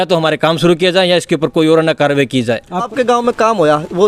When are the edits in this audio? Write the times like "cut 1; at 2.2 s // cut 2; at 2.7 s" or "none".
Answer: cut 1; at 2.9 s